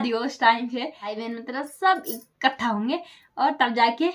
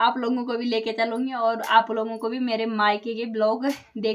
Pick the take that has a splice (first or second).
first